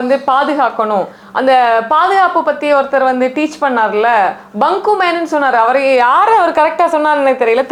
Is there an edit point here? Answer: no; 0 cuts

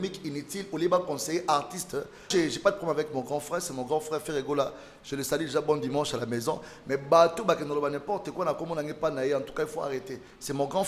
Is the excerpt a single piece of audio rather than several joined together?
no; 1 cut; at 2.3 s

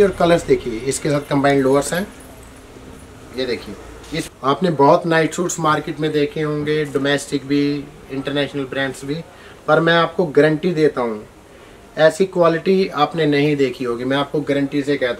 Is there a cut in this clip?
yes; 1 cut; at 4.2 s

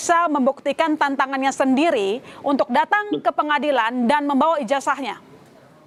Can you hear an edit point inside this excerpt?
no; 0 cuts

